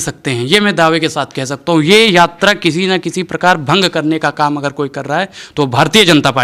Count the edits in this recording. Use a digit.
0